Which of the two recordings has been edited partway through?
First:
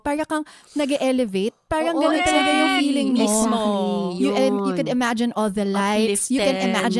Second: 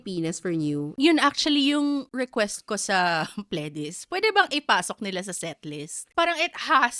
second; 3 cuts; at 1.0 s, 2.1 s, 6.0 s

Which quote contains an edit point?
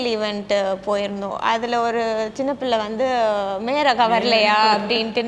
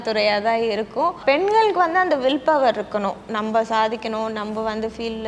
second; 1 cut; at 1.2 s

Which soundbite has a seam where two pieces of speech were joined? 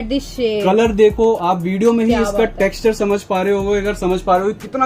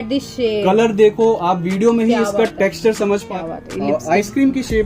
second; 1 cut; at 3.3 s

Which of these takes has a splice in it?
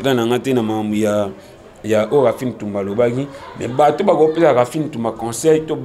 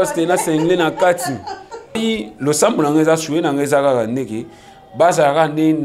second; 1 cut; at 2.0 s

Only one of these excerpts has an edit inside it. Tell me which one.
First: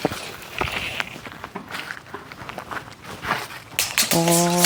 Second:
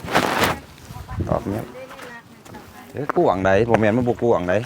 second; 1 cut; at 3.1 s

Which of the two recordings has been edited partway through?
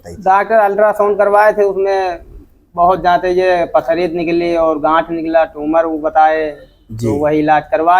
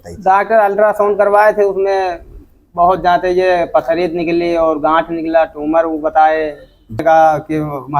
second; 1 cut; at 7.0 s

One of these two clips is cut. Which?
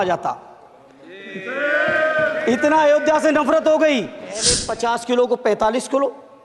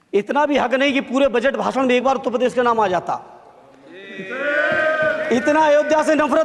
first; 1 cut; at 4.6 s

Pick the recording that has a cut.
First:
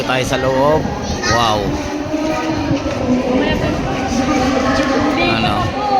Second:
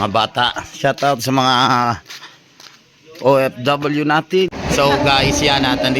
second; 1 cut; at 4.5 s

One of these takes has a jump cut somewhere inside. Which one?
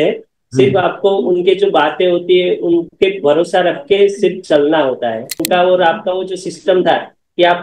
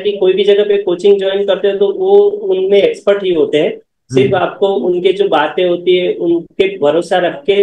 first; 1 cut; at 5.4 s

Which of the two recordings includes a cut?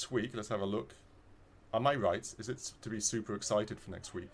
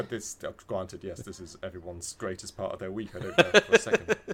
second; 1 cut; at 3.3 s

